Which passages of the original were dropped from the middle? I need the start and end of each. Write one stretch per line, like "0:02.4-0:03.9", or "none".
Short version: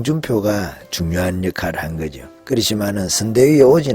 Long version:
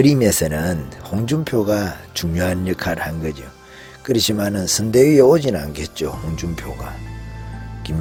0:03.5-0:03.9